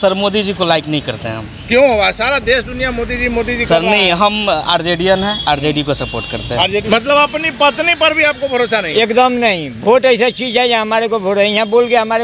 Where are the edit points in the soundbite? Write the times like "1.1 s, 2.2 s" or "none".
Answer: 6.8 s